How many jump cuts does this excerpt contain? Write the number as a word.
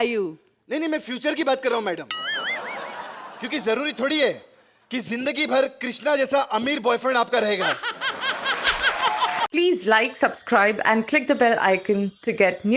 one